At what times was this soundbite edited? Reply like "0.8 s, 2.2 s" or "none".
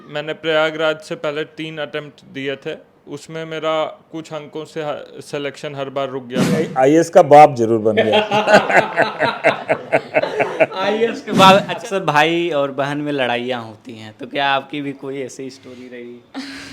6.7 s, 11.7 s